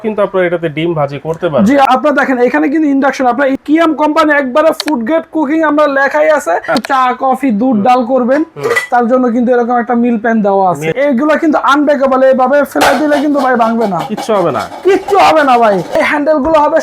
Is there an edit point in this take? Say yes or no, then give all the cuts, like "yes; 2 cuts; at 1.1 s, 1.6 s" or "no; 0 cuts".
yes; 5 cuts; at 1.8 s, 3.5 s, 6.8 s, 10.9 s, 16.0 s